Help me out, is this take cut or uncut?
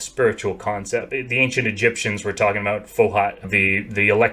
cut